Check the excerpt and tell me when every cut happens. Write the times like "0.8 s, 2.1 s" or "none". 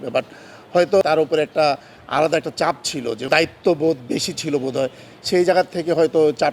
1.0 s, 3.2 s